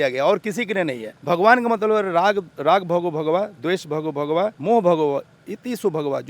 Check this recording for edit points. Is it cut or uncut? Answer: cut